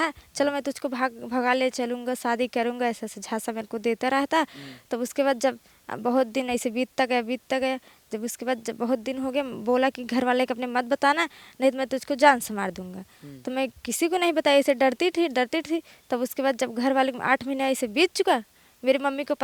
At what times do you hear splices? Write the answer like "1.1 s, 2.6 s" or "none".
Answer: none